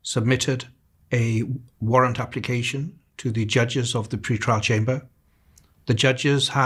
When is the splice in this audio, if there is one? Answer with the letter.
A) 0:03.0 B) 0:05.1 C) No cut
C